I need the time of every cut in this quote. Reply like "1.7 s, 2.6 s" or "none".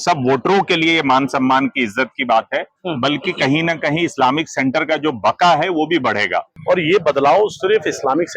6.5 s